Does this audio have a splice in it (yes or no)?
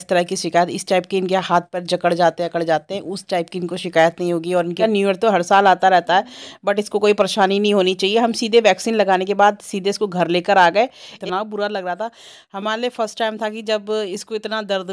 yes